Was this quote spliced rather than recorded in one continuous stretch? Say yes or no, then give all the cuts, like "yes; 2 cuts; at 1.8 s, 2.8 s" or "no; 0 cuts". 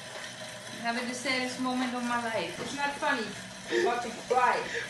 yes; 1 cut; at 2.5 s